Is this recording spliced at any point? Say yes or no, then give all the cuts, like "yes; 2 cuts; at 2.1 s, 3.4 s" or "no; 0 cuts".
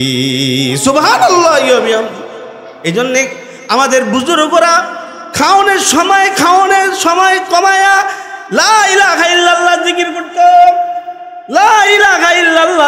no; 0 cuts